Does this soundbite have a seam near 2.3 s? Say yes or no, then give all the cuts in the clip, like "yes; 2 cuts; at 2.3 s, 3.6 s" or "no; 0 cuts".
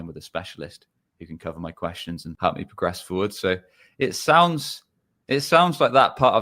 yes; 1 cut; at 2.3 s